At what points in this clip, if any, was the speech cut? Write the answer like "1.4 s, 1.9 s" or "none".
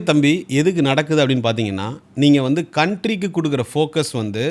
none